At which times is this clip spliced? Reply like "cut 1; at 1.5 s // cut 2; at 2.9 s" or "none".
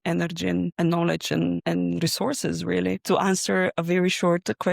cut 1; at 3.0 s